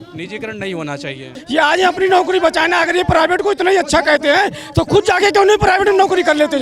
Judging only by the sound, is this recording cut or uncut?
cut